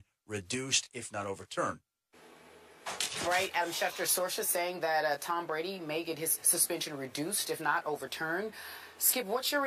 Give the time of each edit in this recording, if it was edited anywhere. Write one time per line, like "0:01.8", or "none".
0:05.5